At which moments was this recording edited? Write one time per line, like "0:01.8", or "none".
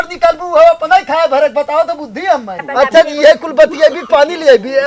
0:02.6